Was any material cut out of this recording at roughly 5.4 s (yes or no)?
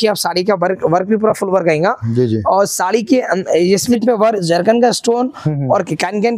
no